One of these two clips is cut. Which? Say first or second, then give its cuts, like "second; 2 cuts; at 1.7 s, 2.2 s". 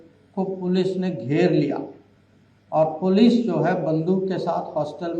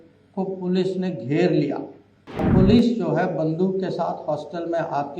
second; 1 cut; at 2.5 s